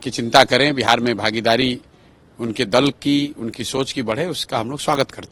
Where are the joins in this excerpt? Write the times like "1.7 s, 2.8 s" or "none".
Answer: none